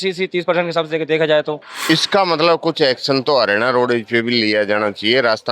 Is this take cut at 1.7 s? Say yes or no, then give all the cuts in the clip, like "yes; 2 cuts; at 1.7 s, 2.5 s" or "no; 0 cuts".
yes; 1 cut; at 1.7 s